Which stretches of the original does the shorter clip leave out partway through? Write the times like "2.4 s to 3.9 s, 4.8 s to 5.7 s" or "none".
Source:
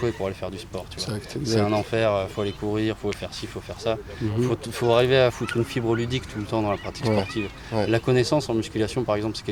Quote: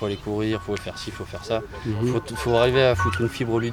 none